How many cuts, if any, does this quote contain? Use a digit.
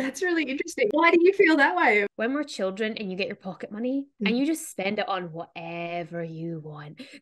3